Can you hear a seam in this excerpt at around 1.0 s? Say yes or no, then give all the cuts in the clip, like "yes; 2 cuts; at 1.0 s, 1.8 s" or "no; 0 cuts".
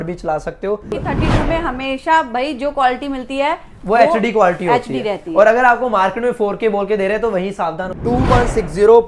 yes; 2 cuts; at 1.0 s, 7.9 s